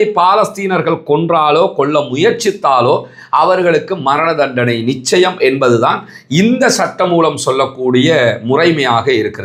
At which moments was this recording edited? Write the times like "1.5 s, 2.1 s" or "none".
none